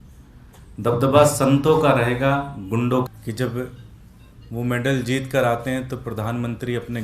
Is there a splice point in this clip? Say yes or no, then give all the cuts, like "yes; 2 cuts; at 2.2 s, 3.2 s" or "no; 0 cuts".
yes; 1 cut; at 3.1 s